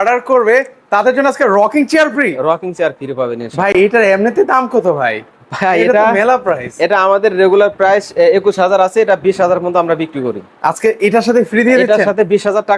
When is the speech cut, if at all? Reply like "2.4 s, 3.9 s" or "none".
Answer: none

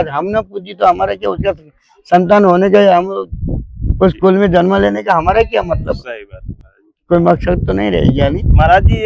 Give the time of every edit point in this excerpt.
none

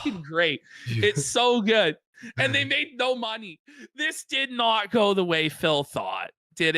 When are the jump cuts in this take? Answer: 3.6 s

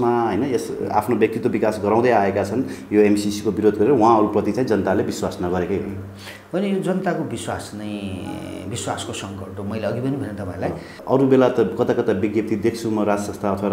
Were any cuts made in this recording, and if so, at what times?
11.0 s

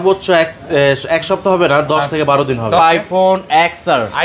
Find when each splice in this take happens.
2.8 s

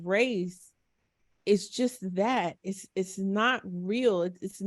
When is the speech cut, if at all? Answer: none

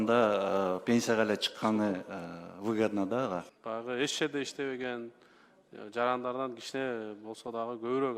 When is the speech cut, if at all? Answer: 3.6 s

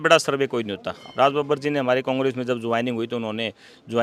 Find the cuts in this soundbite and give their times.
1.0 s

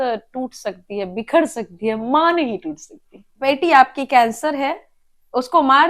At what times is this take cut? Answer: 3.3 s

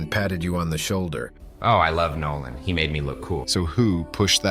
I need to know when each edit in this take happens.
1.2 s

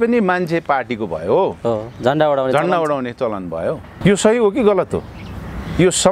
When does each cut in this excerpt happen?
3.9 s

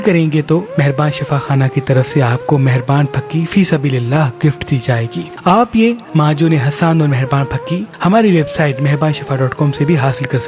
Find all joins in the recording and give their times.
5.3 s

